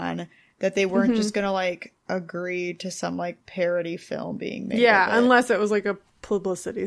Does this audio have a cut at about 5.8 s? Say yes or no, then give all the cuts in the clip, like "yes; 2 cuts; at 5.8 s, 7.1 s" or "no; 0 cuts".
no; 2 cuts; at 1.9 s, 3.4 s